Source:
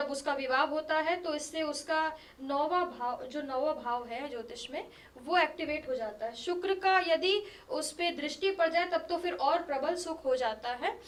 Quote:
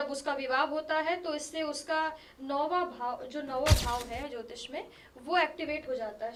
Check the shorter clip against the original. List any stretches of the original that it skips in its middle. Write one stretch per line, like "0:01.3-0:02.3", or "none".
none